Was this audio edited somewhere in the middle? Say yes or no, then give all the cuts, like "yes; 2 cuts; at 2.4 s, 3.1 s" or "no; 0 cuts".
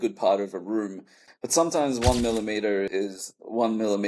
yes; 2 cuts; at 1.3 s, 2.9 s